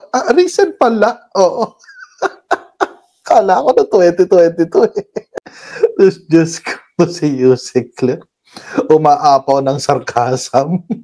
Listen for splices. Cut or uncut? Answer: uncut